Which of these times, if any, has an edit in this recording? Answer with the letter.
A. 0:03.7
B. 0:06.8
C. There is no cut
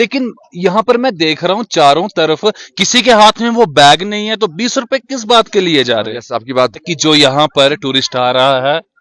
B